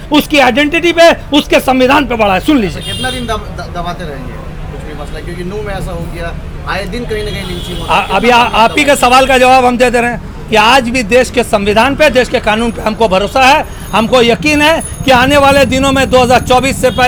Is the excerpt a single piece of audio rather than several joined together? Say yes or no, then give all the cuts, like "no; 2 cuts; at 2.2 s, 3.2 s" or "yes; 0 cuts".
yes; 0 cuts